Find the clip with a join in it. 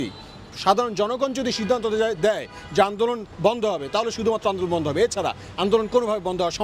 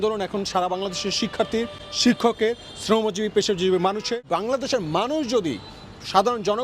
second; 1 cut; at 4.2 s

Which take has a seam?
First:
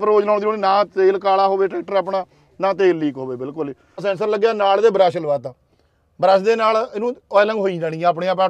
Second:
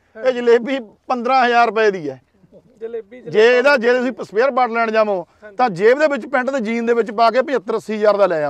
first; 1 cut; at 3.9 s

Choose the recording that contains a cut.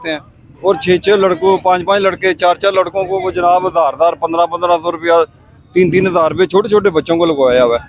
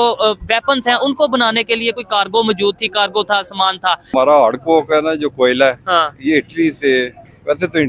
second; 1 cut; at 4.1 s

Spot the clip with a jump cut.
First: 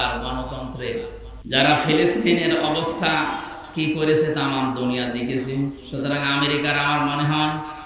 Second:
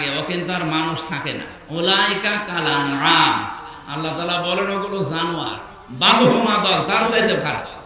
first; 1 cut; at 1.3 s

